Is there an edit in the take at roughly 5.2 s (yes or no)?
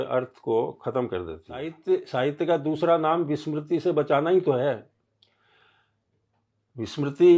no